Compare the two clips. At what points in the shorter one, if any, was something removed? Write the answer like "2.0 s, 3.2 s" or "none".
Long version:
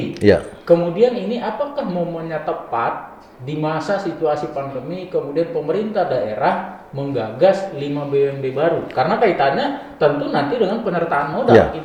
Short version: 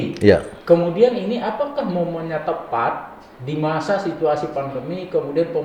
none